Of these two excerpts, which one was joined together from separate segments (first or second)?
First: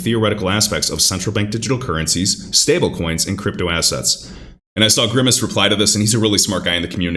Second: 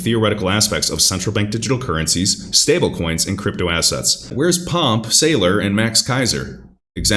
second